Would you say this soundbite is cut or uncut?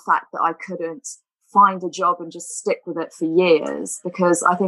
uncut